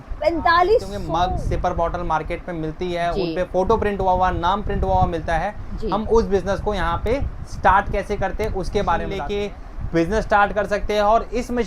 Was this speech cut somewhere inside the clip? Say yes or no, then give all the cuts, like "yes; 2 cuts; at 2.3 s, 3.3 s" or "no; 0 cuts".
yes; 2 cuts; at 1.0 s, 9.2 s